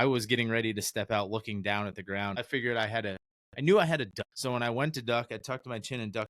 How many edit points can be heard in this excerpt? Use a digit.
2